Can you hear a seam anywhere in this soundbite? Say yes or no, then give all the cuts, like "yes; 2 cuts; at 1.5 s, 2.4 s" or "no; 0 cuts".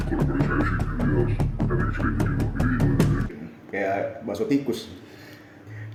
no; 0 cuts